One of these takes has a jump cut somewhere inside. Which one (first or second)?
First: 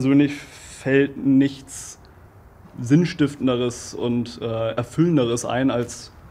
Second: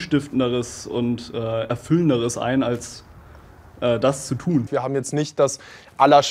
second